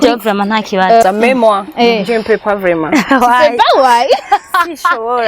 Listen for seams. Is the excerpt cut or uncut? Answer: cut